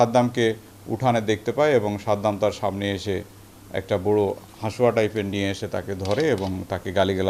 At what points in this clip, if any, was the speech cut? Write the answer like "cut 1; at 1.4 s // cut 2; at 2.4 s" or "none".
none